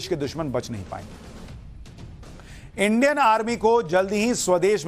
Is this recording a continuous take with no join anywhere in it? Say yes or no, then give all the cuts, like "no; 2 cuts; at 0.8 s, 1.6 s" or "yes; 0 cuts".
yes; 0 cuts